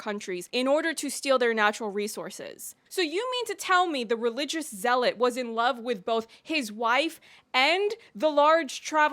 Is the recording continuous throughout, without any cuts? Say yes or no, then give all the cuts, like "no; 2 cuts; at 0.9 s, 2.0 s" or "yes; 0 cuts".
no; 1 cut; at 2.7 s